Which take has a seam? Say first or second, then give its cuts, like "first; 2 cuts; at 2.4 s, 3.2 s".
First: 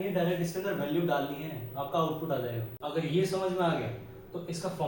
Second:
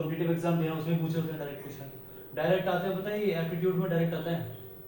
first; 1 cut; at 2.7 s